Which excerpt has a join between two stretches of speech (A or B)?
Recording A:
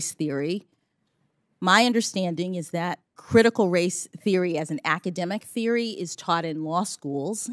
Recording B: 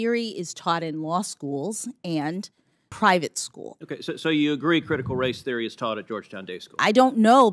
B